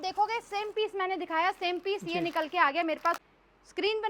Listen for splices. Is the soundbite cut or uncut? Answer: cut